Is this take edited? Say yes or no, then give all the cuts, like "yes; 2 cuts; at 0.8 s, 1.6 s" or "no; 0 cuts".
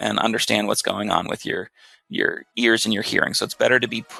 no; 0 cuts